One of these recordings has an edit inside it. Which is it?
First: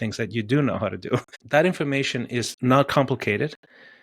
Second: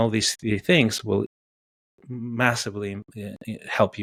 first; 2 cuts; at 1.3 s, 2.5 s

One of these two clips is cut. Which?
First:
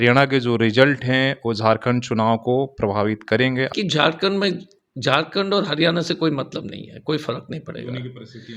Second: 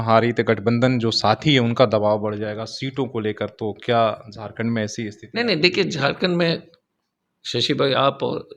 first; 1 cut; at 3.7 s

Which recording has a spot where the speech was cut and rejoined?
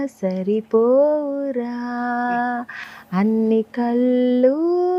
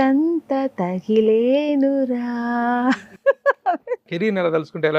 second; 1 cut; at 4.1 s

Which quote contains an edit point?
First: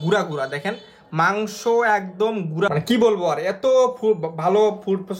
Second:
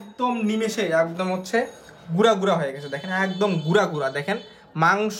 first; 1 cut; at 2.7 s

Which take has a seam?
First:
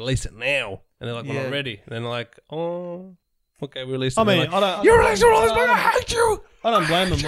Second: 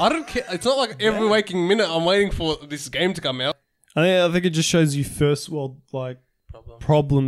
second; 1 cut; at 3.7 s

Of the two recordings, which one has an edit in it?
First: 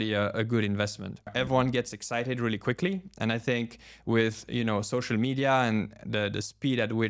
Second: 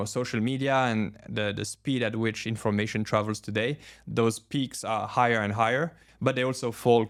first; 1 cut; at 1.3 s

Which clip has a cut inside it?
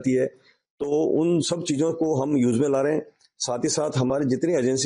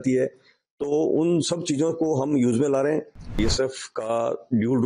second; 1 cut; at 3.4 s

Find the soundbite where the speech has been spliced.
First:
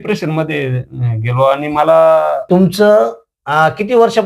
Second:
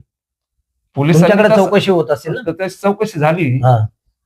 first; 1 cut; at 2.5 s

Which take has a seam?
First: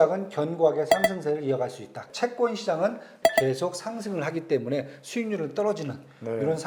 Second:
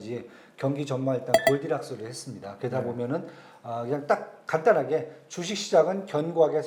first; 2 cuts; at 2.1 s, 3.1 s

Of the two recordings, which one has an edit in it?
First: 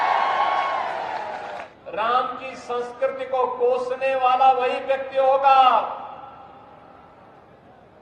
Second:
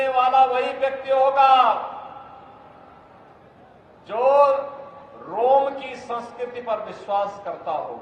first; 1 cut; at 1.7 s

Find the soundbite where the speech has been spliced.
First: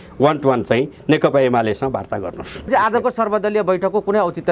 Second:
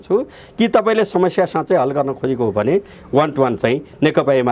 first; 1 cut; at 2.7 s

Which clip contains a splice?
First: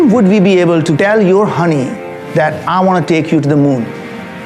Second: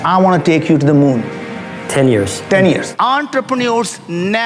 second; 1 cut; at 2.9 s

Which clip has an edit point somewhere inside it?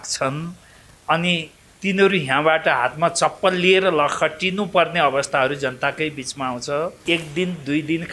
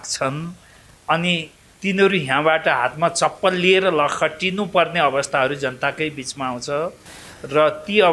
first; 1 cut; at 7.0 s

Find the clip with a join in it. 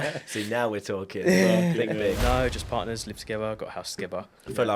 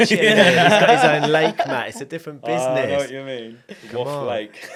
first; 1 cut; at 2.2 s

